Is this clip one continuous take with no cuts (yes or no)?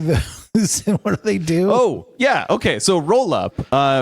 yes